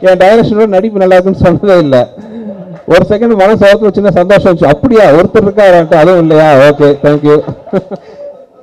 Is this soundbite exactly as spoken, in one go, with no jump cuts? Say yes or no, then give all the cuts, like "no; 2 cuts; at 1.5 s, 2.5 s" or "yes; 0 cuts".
yes; 0 cuts